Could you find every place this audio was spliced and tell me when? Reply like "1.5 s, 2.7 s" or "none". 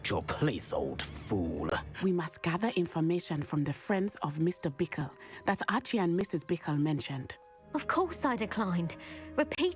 1.9 s, 7.5 s